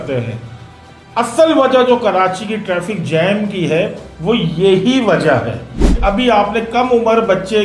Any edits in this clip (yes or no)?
yes